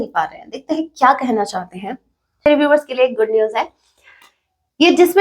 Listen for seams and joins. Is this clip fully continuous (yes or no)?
no